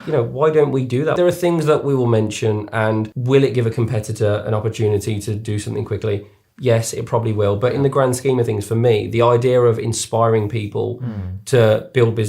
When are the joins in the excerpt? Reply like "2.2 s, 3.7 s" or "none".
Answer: 1.2 s, 3.1 s